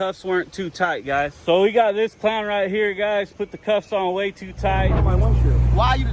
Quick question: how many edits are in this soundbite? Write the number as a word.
two